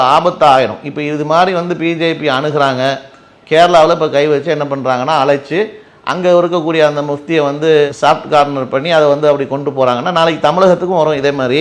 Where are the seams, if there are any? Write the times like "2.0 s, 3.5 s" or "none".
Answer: none